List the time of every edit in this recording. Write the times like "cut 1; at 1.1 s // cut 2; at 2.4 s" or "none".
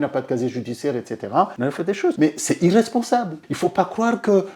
cut 1; at 2.0 s